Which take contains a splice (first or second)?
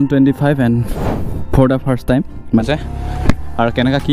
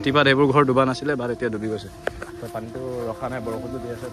first